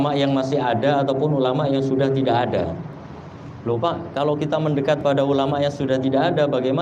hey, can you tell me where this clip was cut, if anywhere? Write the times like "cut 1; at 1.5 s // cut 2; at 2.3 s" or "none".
none